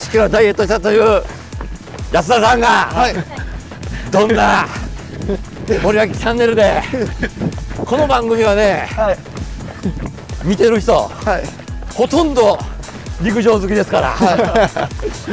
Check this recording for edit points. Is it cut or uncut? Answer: uncut